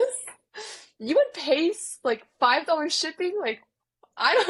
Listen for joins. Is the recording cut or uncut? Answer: uncut